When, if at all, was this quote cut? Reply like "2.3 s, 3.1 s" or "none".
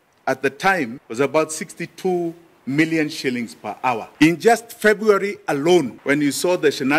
1.0 s, 4.1 s, 5.9 s